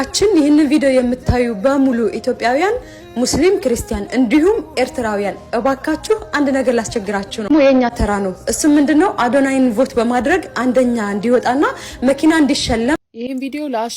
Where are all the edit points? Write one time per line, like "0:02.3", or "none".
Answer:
0:07.5
0:12.9